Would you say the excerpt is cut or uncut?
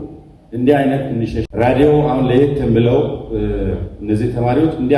cut